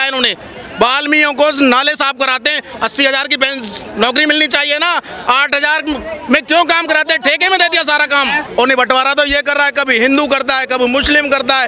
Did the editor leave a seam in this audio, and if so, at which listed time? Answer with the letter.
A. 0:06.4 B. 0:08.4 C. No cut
B